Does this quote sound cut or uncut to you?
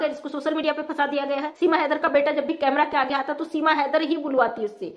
cut